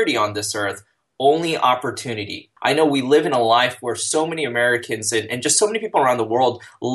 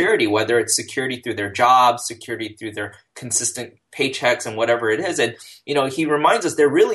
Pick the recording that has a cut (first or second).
first